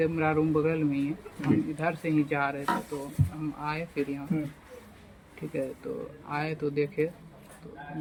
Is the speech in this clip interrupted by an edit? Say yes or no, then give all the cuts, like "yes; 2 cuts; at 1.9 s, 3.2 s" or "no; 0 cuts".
no; 0 cuts